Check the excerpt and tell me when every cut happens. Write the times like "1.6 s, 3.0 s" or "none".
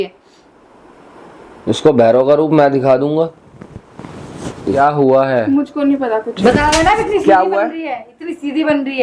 4.8 s